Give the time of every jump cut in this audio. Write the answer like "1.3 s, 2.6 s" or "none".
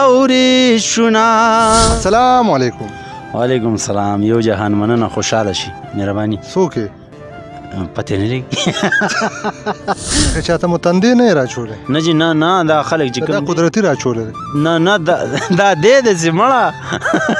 1.9 s, 10.3 s